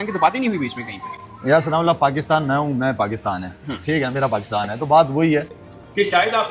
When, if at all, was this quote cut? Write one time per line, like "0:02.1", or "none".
0:05.6